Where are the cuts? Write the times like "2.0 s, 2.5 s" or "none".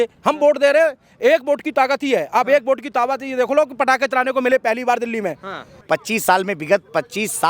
5.7 s